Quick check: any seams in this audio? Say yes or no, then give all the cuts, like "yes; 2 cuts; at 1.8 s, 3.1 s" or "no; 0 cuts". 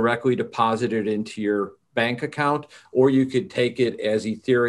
no; 0 cuts